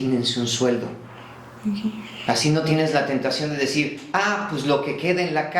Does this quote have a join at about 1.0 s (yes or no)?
no